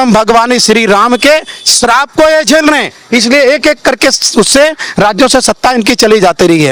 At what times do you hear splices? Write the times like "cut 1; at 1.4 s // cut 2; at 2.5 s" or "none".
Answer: none